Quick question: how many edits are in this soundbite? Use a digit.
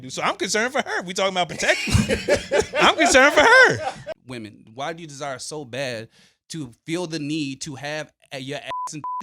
1